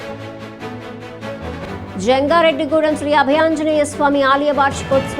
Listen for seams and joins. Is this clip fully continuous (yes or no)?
no